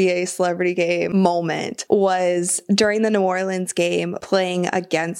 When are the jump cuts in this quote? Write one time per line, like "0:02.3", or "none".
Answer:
0:01.2
0:04.2